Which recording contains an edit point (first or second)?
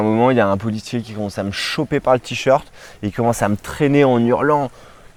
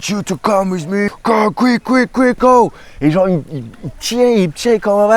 second